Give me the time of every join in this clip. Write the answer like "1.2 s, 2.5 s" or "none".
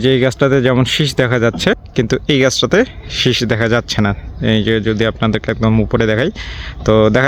none